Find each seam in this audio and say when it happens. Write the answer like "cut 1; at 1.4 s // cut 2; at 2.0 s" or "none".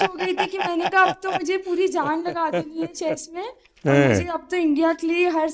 none

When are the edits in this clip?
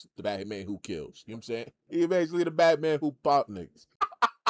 cut 1; at 1.8 s

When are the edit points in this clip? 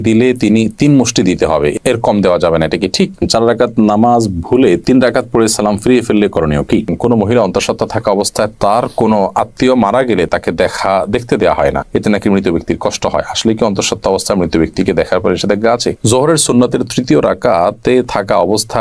cut 1; at 3.2 s // cut 2; at 6.9 s // cut 3; at 16.0 s

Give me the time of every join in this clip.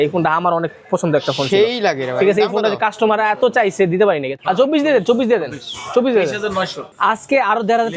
cut 1; at 4.3 s // cut 2; at 6.8 s

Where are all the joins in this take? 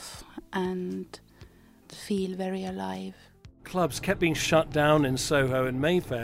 cut 1; at 1.9 s // cut 2; at 3.6 s

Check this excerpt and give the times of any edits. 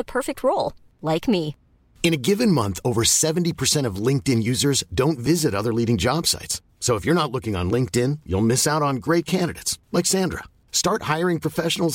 none

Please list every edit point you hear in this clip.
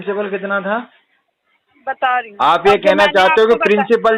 cut 1; at 2.3 s

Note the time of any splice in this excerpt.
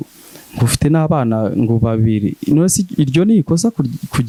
none

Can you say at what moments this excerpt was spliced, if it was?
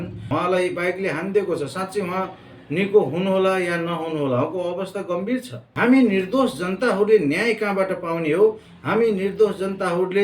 cut 1; at 5.6 s

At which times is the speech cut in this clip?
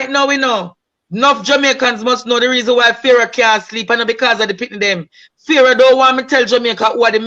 none

